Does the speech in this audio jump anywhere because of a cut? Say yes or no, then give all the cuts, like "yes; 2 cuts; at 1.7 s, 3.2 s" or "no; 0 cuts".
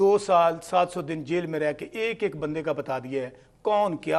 no; 0 cuts